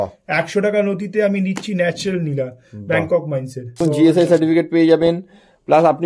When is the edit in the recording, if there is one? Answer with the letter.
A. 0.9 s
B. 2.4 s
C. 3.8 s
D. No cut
C